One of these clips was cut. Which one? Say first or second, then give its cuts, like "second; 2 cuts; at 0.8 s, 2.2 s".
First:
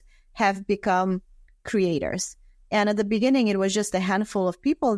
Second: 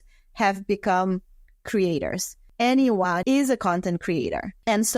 second; 2 cuts; at 2.4 s, 3.2 s